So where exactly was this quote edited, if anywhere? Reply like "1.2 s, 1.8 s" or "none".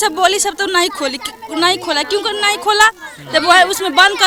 none